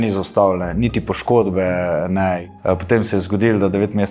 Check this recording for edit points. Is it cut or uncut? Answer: cut